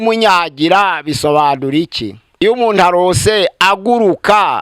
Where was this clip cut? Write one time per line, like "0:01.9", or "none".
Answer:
0:02.4